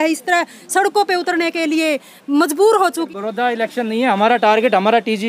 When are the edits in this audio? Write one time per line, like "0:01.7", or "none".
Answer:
0:03.1